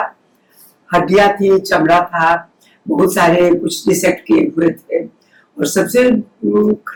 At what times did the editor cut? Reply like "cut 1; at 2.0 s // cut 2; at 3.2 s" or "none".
none